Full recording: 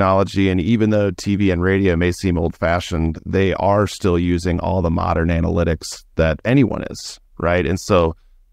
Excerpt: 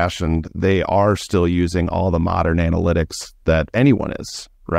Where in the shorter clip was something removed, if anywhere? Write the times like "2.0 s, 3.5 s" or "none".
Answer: none